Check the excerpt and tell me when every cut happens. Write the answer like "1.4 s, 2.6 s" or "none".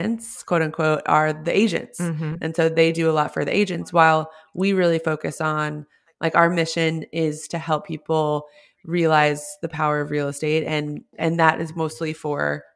11.1 s

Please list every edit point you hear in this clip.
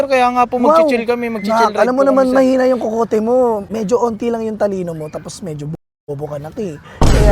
3.7 s

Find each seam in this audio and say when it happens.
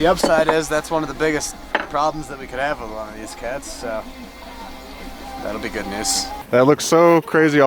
6.4 s

